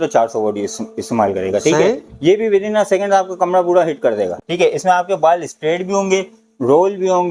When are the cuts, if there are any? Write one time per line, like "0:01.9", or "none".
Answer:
0:04.4